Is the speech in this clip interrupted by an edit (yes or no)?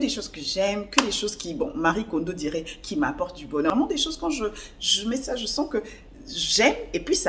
yes